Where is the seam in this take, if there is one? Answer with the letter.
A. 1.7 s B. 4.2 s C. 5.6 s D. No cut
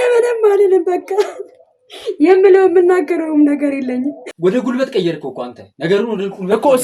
B